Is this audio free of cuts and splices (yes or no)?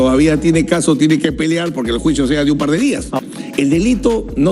no